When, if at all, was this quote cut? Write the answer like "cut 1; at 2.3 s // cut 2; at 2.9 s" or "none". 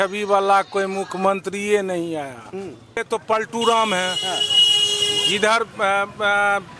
cut 1; at 3.1 s